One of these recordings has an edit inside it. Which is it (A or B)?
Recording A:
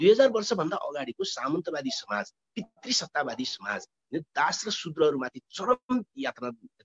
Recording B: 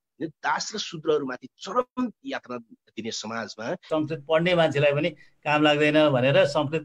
B